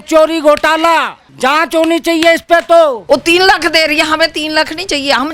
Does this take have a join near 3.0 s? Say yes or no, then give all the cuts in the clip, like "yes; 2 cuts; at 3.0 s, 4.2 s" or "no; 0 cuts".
yes; 2 cuts; at 1.2 s, 3.0 s